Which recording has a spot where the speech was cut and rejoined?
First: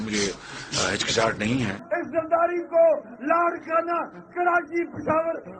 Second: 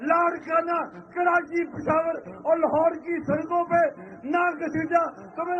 first; 1 cut; at 1.8 s

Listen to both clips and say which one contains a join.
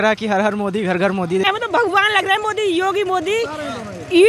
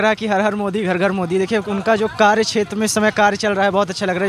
first; 1 cut; at 1.5 s

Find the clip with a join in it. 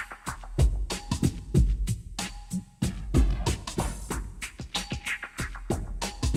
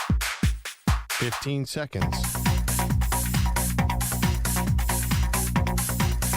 second; 1 cut; at 1.1 s

